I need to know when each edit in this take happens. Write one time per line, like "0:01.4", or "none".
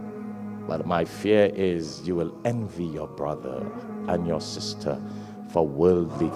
none